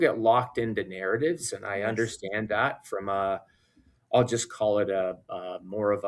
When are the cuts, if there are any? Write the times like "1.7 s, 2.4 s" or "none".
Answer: none